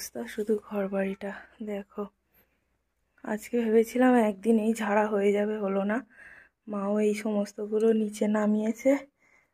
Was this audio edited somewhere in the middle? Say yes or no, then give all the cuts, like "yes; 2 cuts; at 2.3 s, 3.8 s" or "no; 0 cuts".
no; 0 cuts